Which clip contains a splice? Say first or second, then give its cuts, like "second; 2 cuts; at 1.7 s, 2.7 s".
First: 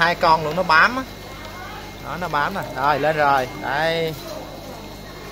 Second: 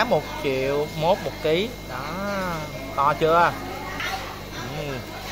second; 1 cut; at 4.0 s